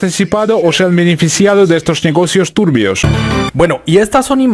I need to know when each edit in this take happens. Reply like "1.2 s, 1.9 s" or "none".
3.1 s